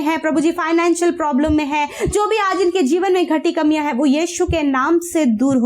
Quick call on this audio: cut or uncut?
uncut